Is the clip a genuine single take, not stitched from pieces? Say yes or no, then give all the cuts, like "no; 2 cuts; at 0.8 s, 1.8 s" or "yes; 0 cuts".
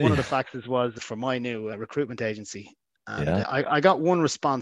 yes; 0 cuts